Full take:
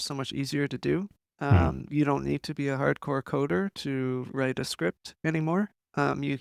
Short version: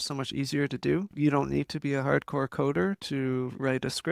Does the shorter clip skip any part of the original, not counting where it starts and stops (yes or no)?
yes